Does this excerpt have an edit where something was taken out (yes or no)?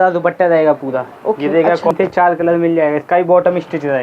yes